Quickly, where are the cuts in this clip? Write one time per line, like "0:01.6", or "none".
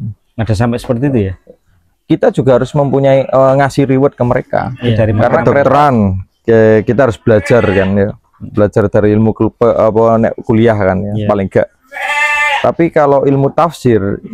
0:05.5